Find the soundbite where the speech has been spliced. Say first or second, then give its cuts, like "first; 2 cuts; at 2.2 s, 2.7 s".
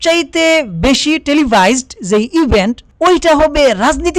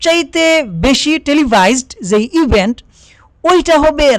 first; 1 cut; at 2.8 s